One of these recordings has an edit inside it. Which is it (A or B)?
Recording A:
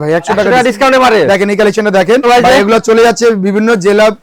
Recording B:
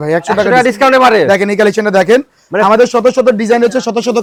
A